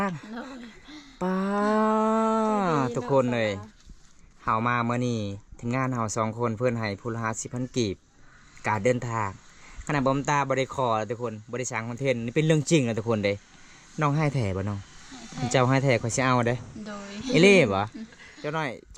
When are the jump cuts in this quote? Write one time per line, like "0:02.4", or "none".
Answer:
none

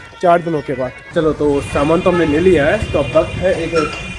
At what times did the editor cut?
0:01.0

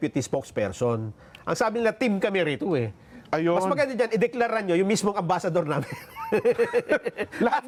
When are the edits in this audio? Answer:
none

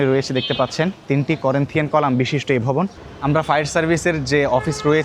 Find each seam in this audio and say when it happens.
0:01.0
0:03.1

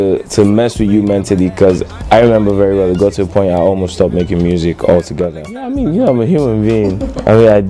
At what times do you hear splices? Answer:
0:05.7

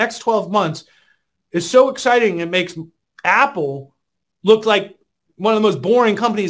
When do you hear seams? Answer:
none

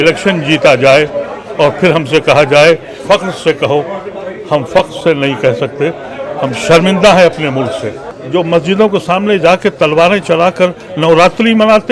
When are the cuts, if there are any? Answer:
0:08.2

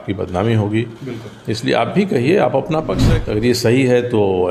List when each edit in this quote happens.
0:03.0

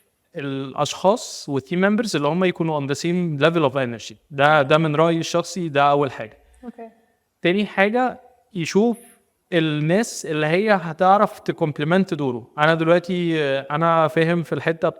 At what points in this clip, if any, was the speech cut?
none

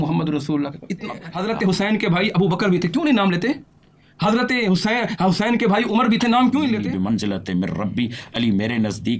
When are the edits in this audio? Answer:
0:01.3
0:06.8

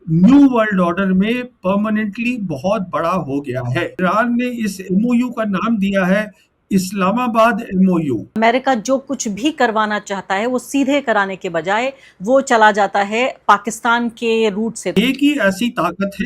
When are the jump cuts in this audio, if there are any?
0:04.0
0:08.4
0:14.9

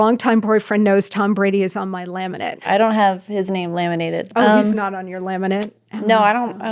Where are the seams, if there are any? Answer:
0:02.7
0:04.3

